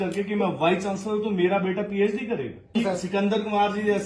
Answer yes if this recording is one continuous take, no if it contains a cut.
no